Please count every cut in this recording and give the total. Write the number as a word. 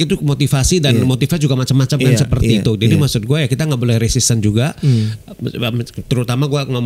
zero